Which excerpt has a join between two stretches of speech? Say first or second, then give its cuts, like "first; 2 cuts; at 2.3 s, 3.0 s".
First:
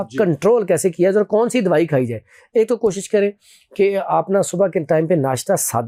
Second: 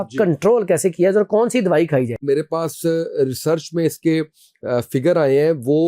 second; 1 cut; at 2.2 s